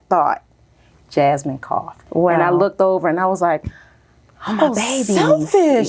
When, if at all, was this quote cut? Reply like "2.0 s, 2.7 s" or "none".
1.9 s